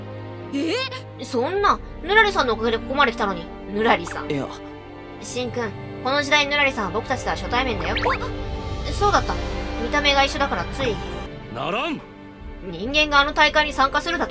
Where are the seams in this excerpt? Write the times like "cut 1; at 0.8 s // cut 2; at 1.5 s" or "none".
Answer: cut 1; at 11.3 s